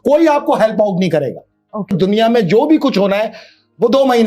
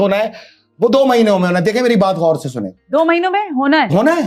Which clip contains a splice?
first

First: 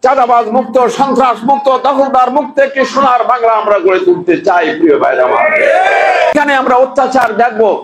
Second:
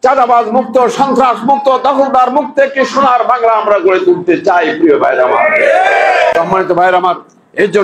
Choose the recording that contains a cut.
first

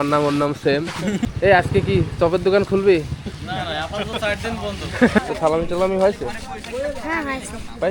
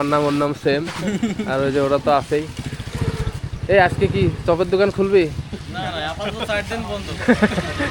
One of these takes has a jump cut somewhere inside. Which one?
first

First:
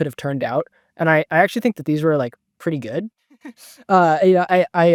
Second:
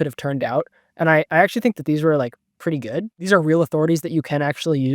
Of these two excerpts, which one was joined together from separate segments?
second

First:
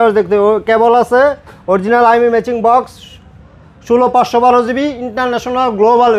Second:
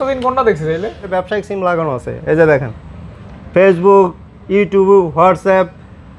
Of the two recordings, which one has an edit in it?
second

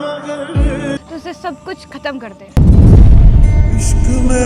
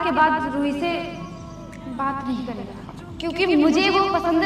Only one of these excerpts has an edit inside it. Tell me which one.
first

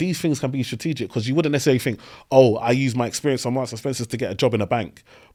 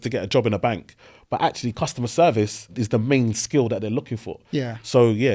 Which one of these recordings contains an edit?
second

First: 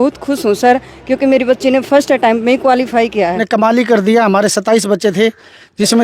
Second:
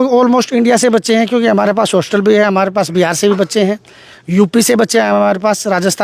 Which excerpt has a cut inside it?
first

